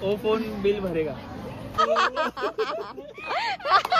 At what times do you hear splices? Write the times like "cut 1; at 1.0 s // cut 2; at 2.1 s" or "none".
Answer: cut 1; at 1.8 s

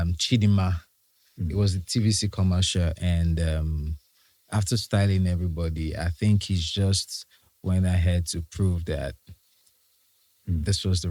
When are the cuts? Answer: none

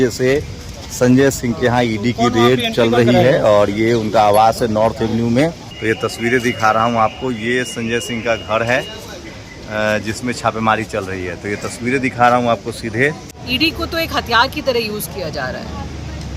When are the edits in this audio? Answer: cut 1; at 5.7 s // cut 2; at 13.3 s

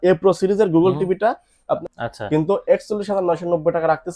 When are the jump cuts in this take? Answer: cut 1; at 1.8 s

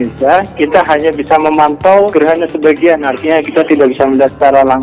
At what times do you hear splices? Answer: cut 1; at 2.1 s

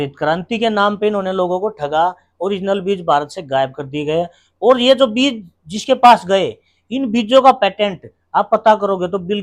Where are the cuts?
none

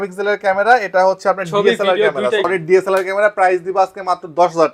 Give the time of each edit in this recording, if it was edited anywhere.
none

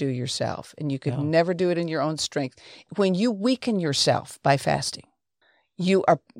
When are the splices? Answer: cut 1; at 2.9 s

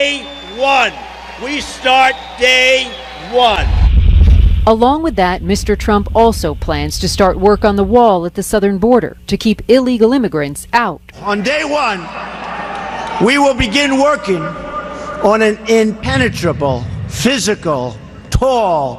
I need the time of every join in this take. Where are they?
none

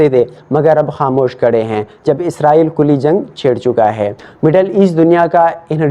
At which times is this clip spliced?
cut 1; at 4.2 s

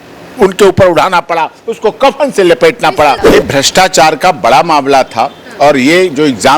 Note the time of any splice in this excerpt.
cut 1; at 3.3 s

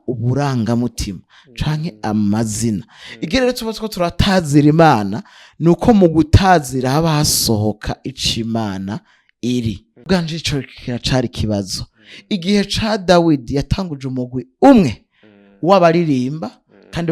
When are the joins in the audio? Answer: cut 1; at 10.1 s

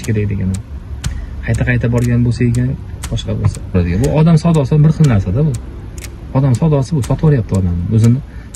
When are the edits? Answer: cut 1; at 3.7 s

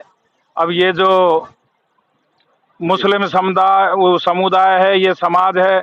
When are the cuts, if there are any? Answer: cut 1; at 1.3 s

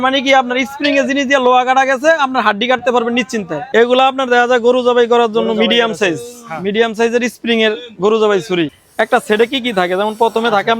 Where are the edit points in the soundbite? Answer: cut 1; at 3.6 s // cut 2; at 8.8 s

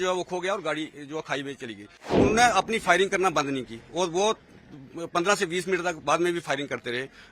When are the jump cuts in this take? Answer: cut 1; at 2.1 s

